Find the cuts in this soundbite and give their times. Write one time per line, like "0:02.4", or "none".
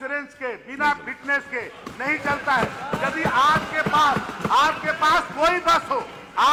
none